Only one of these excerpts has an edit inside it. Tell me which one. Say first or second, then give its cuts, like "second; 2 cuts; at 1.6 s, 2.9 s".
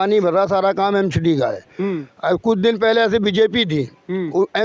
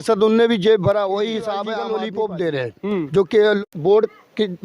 second; 2 cuts; at 1.7 s, 3.7 s